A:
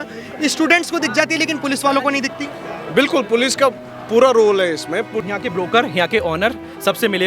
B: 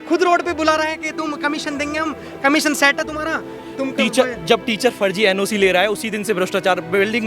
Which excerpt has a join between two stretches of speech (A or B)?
A